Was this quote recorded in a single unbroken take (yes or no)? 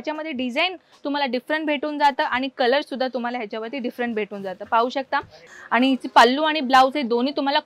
no